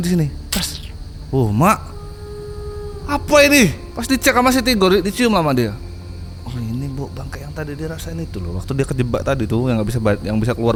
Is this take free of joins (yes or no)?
yes